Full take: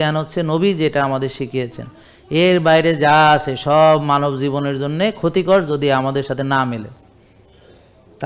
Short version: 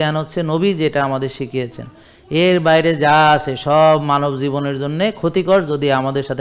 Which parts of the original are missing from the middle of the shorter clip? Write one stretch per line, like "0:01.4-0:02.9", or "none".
none